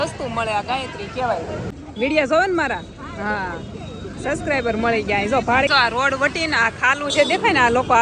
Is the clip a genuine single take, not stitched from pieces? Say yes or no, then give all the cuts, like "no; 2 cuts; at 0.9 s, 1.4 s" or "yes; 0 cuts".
no; 2 cuts; at 1.7 s, 5.7 s